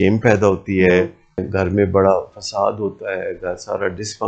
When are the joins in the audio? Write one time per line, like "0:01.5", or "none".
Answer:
0:01.5